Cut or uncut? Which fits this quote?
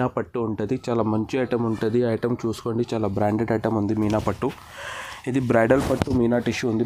uncut